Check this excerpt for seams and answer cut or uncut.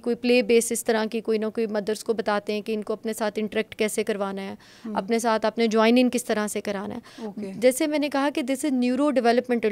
uncut